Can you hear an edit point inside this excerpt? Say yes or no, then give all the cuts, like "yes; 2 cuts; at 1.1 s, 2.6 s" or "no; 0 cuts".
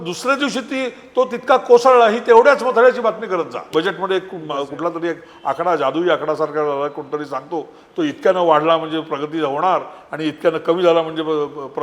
yes; 1 cut; at 3.7 s